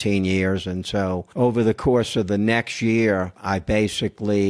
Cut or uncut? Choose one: cut